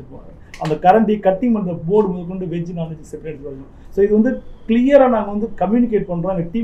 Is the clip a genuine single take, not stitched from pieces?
yes; 0 cuts

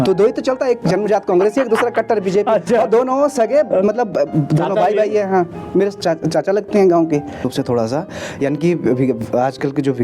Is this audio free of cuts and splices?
no; 1 cut; at 7.5 s

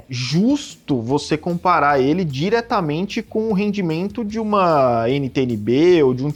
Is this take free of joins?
yes; 0 cuts

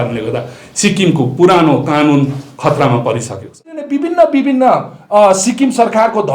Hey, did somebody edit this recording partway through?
yes; 1 cut; at 3.9 s

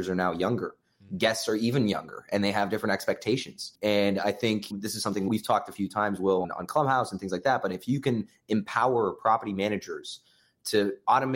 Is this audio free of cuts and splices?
no; 3 cuts; at 3.7 s, 5.2 s, 6.5 s

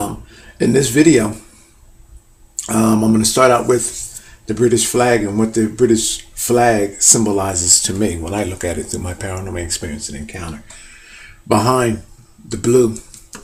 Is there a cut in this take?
no; 0 cuts

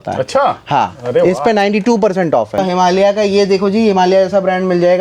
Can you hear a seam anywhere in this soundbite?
yes; 1 cut; at 2.6 s

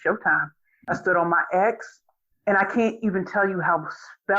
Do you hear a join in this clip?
yes; 1 cut; at 0.9 s

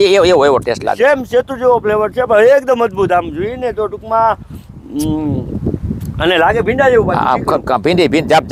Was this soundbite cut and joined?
no; 0 cuts

